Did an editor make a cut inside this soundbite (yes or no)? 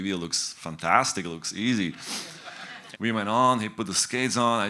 yes